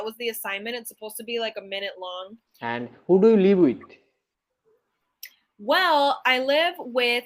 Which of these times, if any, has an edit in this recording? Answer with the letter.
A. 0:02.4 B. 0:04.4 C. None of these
A